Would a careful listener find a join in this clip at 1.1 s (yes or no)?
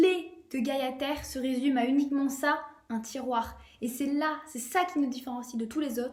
no